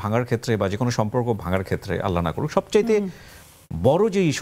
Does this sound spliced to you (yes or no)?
no